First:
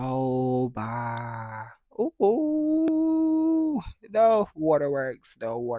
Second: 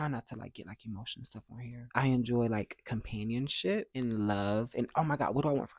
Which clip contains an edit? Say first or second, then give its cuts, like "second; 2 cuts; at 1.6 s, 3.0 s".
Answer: second; 1 cut; at 1.9 s